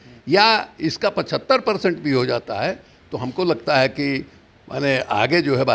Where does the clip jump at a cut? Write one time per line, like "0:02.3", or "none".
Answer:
none